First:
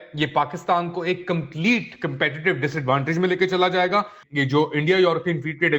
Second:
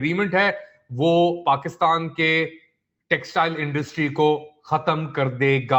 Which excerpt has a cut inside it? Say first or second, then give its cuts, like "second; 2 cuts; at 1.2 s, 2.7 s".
first; 1 cut; at 4.2 s